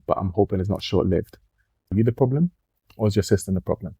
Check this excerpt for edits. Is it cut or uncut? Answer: cut